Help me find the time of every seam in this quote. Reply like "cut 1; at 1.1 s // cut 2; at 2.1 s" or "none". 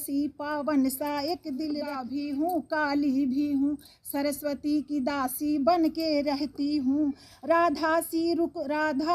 cut 1; at 2.0 s